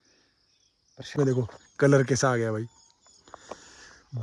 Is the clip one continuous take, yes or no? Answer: no